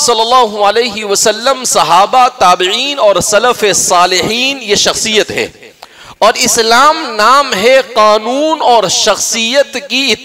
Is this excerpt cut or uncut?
uncut